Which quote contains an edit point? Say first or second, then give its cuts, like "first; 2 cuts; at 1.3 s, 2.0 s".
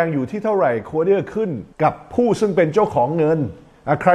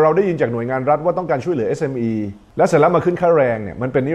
first; 1 cut; at 1.6 s